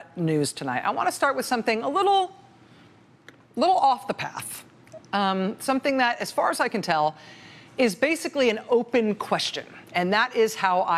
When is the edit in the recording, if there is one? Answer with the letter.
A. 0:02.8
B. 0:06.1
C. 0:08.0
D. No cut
D